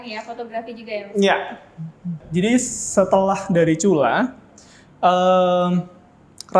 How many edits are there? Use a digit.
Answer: 1